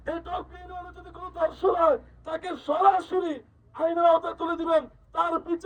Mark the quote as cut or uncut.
uncut